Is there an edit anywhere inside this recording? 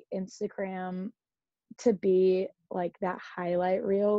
no; 0 cuts

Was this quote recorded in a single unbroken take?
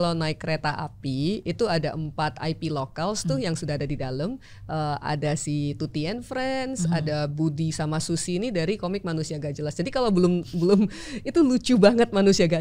yes; 0 cuts

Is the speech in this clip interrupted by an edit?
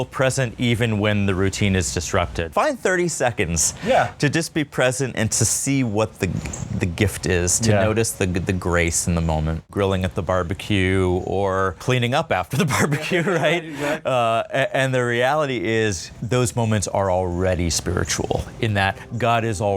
yes; 4 cuts; at 2.5 s, 9.6 s, 11.8 s, 16.1 s

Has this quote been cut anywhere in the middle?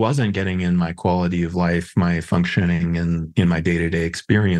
no; 0 cuts

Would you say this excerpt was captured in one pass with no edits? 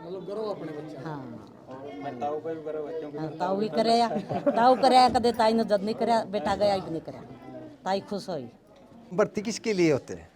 no; 1 cut; at 9.1 s

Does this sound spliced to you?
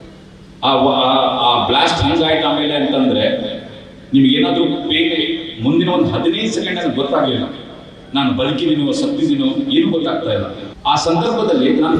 yes; 1 cut; at 10.6 s

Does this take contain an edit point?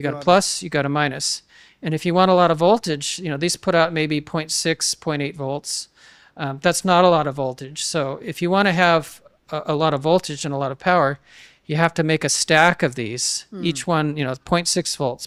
no; 0 cuts

